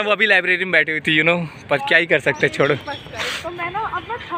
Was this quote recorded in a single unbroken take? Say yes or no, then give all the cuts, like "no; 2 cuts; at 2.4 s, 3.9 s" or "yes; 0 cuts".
yes; 0 cuts